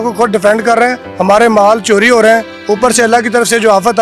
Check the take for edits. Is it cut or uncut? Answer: cut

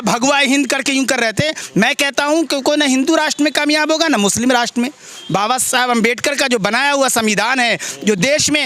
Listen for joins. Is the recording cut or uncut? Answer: uncut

